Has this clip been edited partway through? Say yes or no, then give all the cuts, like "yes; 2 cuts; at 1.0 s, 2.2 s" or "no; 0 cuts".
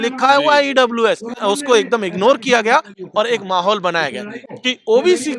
yes; 2 cuts; at 1.4 s, 4.5 s